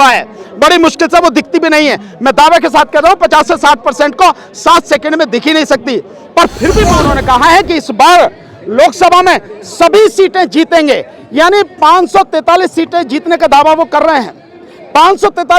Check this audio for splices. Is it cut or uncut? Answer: cut